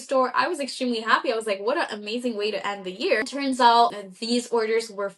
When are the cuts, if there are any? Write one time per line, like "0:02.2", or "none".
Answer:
0:03.3
0:04.0